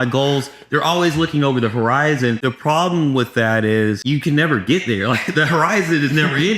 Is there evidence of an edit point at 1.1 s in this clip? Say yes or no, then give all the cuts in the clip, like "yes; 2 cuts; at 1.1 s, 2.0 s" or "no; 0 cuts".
no; 2 cuts; at 2.4 s, 4.0 s